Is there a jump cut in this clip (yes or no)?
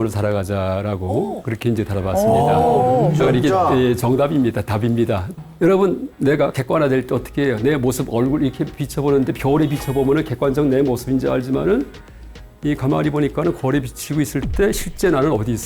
yes